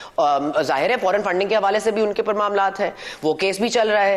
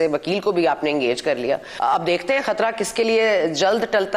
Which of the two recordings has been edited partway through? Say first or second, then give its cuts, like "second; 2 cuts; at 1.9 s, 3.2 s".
second; 1 cut; at 1.7 s